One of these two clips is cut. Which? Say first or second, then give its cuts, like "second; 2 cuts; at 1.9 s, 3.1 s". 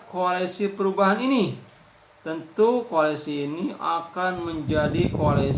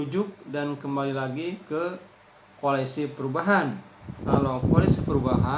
second; 1 cut; at 4.3 s